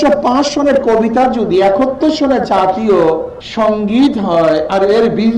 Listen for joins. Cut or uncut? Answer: cut